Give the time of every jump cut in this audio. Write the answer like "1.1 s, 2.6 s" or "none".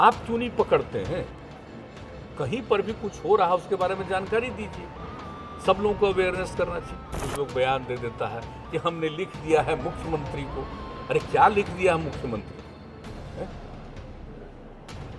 7.2 s

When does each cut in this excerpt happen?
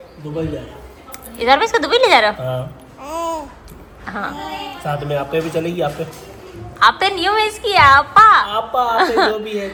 none

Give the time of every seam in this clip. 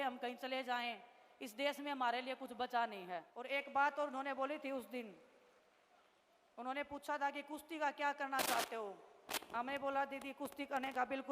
3.3 s

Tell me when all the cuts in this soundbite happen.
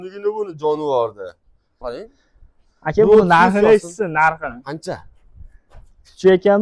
1.9 s

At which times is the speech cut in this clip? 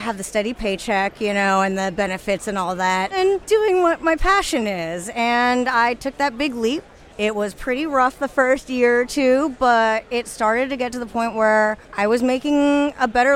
3.1 s, 7.0 s, 11.8 s

